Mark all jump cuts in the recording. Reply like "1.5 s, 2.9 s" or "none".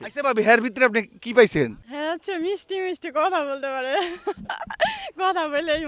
1.8 s